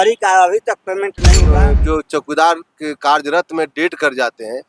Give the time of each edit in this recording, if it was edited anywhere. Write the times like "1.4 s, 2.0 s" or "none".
1.5 s